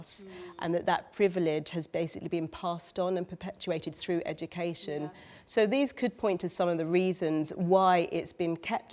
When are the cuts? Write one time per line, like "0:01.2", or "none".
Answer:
none